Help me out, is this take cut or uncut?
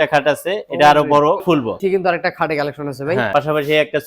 cut